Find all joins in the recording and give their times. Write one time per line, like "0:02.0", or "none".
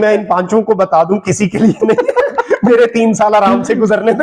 none

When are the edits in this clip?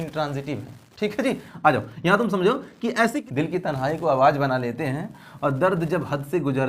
0:03.2

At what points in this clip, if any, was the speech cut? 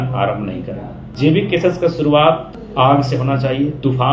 0:01.0
0:02.6

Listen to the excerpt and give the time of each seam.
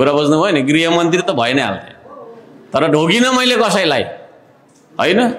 none

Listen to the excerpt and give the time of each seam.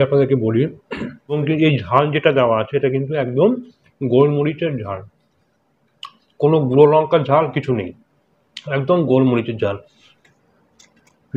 0:01.4
0:10.0

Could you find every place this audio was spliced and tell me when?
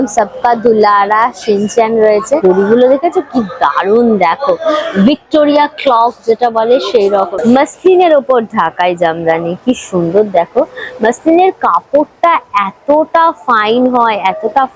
0:02.4
0:07.3

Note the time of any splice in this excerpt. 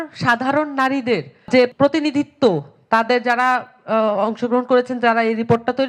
none

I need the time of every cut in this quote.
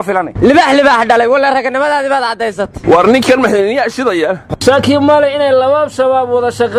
0:04.5

